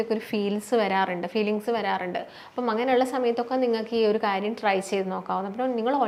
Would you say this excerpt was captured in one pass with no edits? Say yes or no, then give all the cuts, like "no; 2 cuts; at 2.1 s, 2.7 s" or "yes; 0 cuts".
yes; 0 cuts